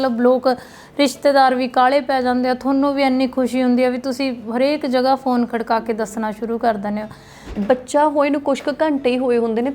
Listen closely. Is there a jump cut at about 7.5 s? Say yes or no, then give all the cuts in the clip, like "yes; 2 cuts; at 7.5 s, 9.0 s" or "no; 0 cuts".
yes; 1 cut; at 7.5 s